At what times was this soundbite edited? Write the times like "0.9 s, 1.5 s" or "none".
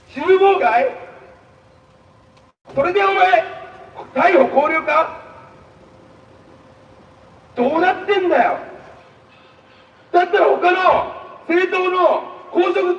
none